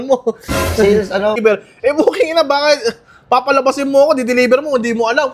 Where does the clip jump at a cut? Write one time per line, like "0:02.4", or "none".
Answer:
0:01.4